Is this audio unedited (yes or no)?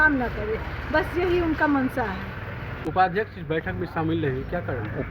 no